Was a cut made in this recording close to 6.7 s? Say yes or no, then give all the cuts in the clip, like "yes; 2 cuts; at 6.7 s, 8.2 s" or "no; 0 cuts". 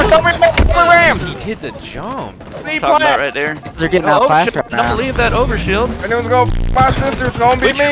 no; 1 cut; at 2.6 s